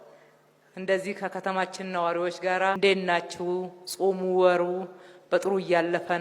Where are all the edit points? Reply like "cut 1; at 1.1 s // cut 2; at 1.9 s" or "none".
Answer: cut 1; at 2.8 s

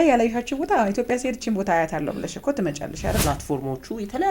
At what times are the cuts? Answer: cut 1; at 3.2 s

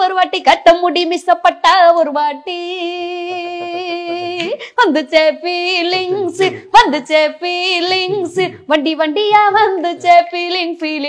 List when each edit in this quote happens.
none

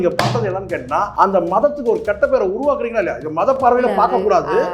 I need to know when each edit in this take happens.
cut 1; at 1.1 s

